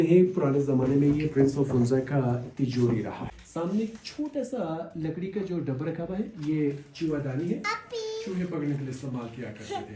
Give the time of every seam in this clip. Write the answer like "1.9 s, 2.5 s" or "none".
3.3 s